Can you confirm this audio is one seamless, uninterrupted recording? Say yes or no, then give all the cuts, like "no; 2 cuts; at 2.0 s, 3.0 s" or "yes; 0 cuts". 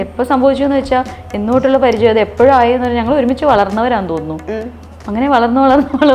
yes; 0 cuts